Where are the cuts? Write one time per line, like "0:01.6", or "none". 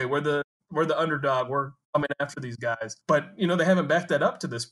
0:02.9